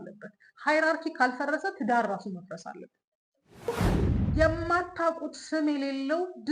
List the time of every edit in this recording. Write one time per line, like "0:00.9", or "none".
0:03.7